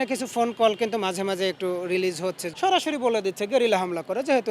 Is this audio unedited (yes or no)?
no